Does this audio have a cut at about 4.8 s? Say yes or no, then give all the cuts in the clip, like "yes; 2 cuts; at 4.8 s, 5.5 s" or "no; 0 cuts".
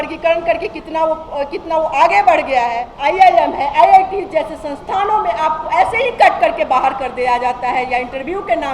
no; 1 cut; at 2.9 s